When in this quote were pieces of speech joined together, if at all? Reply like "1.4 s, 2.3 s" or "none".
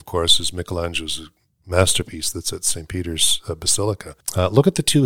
4.1 s